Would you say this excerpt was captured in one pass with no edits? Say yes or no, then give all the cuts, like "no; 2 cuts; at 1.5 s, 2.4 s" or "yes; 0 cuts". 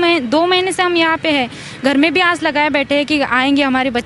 yes; 0 cuts